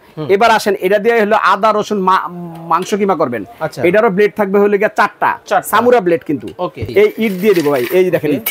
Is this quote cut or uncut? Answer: cut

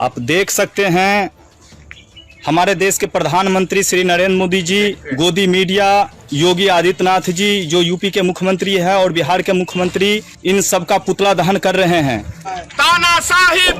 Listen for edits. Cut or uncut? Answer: cut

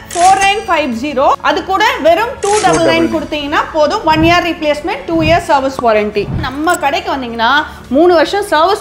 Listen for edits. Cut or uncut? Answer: cut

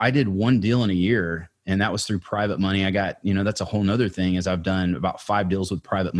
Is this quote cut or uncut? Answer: uncut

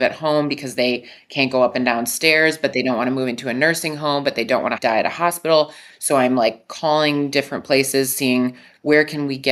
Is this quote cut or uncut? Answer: cut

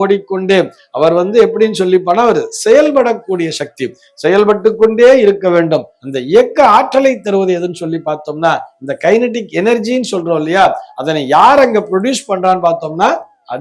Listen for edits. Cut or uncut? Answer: uncut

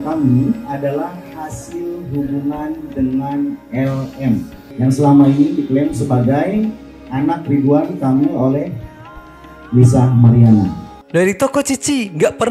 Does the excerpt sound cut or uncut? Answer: cut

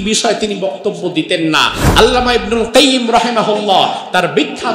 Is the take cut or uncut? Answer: cut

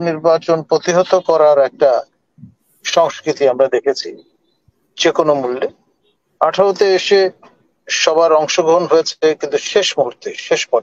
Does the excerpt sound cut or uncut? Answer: uncut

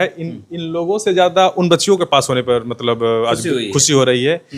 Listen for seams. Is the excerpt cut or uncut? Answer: uncut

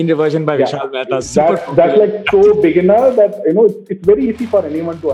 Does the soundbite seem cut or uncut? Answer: uncut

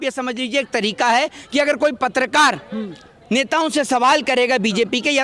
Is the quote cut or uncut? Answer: uncut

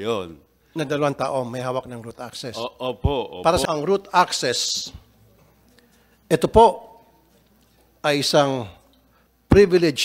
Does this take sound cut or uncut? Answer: cut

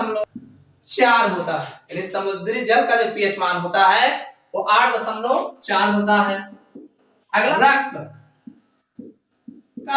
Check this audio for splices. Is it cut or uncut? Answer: uncut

